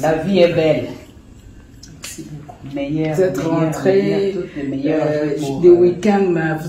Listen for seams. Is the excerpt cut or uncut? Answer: uncut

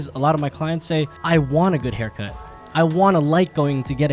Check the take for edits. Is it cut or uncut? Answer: cut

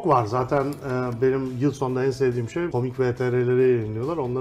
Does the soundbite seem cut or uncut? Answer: cut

